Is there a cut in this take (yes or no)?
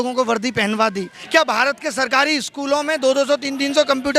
yes